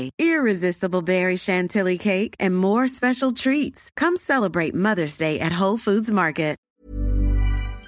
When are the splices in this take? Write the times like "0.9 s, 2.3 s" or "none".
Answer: 6.6 s

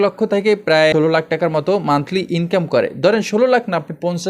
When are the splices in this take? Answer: 0.9 s

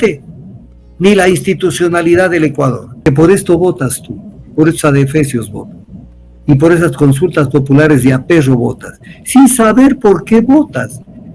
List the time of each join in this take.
3.0 s

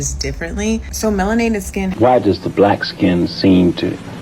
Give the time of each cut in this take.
1.9 s

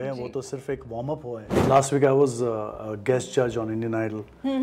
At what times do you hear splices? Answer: 1.5 s

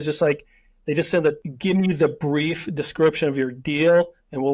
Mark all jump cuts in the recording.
1.4 s

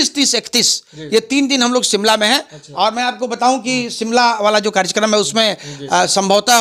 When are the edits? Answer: none

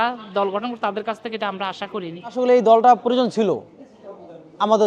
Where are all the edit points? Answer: 2.3 s

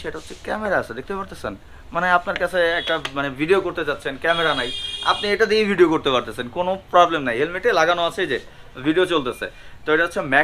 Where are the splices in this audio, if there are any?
none

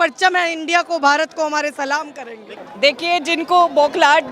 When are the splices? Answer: 2.6 s

